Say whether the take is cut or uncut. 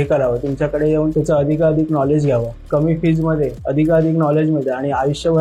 cut